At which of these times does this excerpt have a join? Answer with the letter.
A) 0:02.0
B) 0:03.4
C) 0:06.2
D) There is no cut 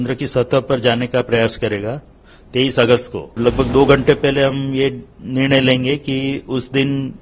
B